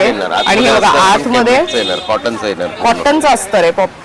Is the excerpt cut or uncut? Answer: uncut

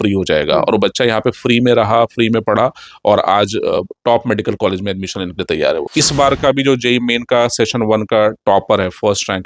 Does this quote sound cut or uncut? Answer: cut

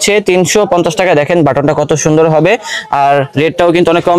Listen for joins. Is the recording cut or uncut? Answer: uncut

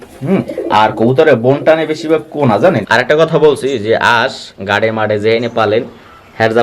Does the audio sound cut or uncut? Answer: cut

